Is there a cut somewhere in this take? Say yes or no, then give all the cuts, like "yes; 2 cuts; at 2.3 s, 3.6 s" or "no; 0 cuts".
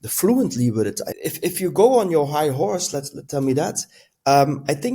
yes; 1 cut; at 1.1 s